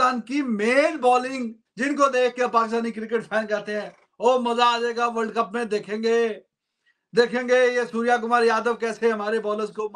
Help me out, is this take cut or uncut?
cut